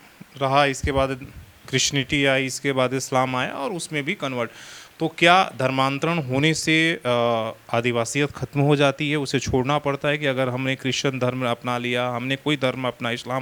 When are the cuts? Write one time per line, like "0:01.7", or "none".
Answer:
none

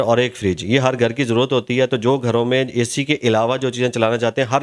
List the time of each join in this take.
none

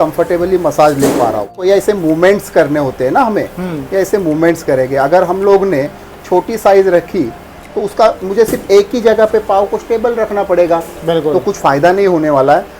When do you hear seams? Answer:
0:01.5

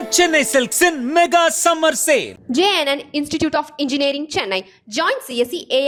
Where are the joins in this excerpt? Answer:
none

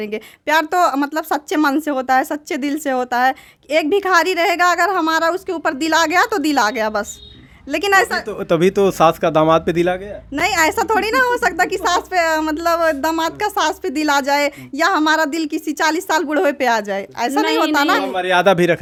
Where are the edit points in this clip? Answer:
none

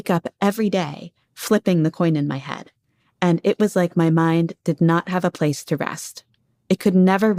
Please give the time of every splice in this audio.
none

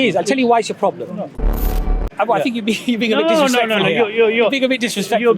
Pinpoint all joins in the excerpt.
0:01.5

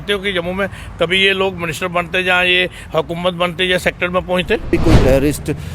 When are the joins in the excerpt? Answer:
0:04.7

